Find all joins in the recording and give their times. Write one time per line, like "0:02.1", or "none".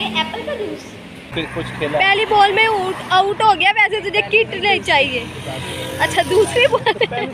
0:01.3